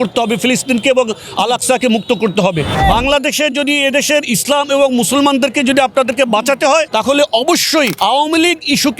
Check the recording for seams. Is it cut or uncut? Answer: cut